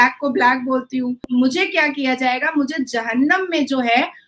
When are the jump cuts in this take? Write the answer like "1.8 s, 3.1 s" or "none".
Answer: 1.2 s